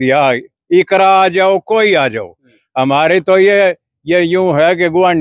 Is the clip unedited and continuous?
yes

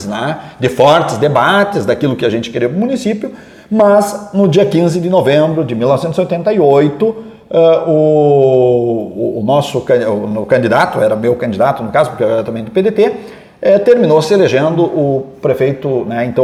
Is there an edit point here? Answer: no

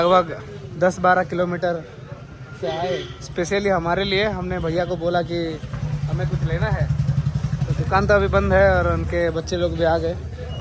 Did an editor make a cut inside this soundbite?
no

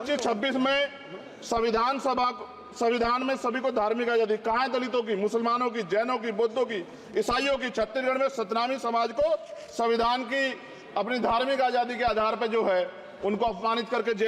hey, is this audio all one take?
yes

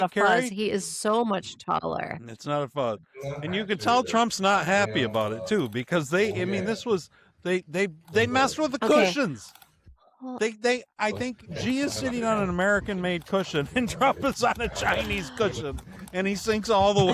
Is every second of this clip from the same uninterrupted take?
yes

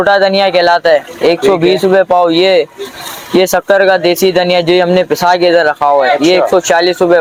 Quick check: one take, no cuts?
yes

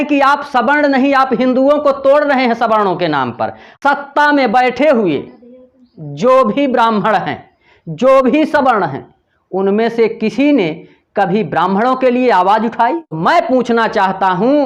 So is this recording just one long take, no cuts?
no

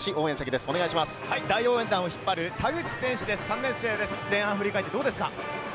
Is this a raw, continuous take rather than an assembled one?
yes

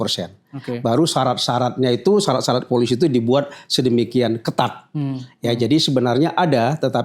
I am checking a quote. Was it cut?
no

